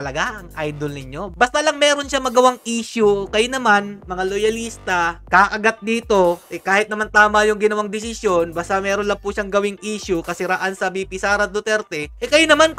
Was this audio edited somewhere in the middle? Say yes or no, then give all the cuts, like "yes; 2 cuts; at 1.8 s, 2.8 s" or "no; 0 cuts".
no; 0 cuts